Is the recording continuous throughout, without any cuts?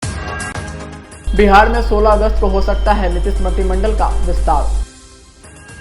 yes; 0 cuts

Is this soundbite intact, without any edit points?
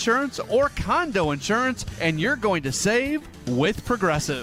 yes; 0 cuts

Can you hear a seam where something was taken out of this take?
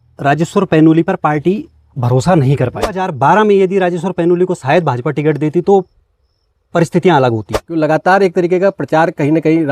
yes; 2 cuts; at 3.1 s, 7.6 s

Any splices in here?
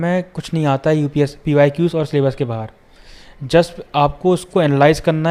no; 0 cuts

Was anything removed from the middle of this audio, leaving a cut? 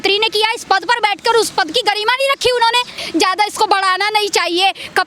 yes; 1 cut; at 3.0 s

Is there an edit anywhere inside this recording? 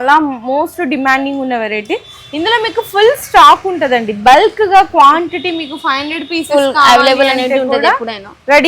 no; 0 cuts

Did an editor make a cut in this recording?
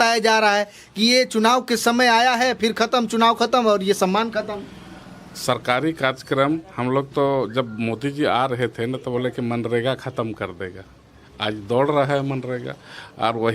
no; 0 cuts

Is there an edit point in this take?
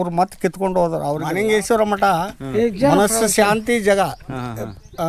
yes; 1 cut; at 1.2 s

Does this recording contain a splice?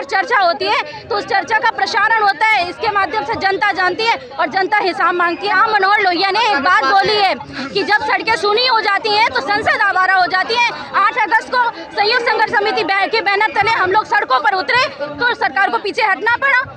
yes; 1 cut; at 5.5 s

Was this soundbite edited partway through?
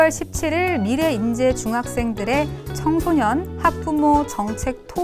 no; 0 cuts

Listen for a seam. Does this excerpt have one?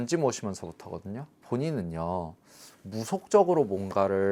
yes; 1 cut; at 1.4 s

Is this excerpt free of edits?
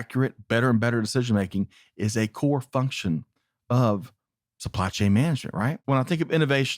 no; 1 cut; at 5.8 s

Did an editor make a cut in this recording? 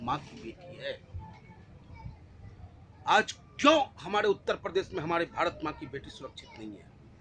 no; 0 cuts

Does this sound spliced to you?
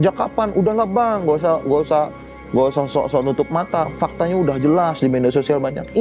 no; 0 cuts

